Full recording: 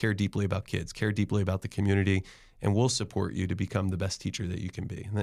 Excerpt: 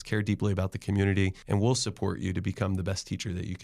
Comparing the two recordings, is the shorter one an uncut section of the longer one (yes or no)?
no